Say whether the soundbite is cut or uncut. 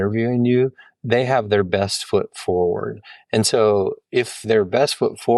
uncut